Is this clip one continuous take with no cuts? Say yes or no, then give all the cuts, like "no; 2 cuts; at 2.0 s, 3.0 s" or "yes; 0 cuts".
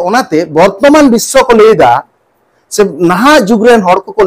yes; 0 cuts